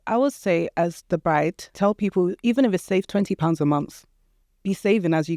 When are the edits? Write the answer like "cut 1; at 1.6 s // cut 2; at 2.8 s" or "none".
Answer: cut 1; at 1.6 s